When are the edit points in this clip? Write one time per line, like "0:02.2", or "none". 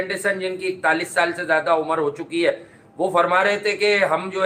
none

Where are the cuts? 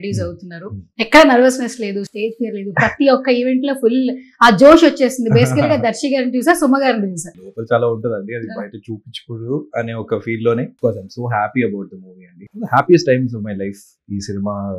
0:07.5
0:10.7
0:12.4

